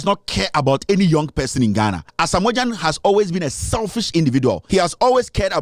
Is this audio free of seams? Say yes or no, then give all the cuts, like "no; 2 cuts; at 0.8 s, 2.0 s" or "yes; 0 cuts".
no; 2 cuts; at 2.1 s, 4.6 s